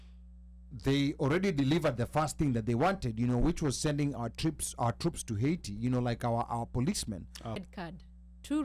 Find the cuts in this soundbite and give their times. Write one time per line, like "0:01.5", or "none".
0:07.6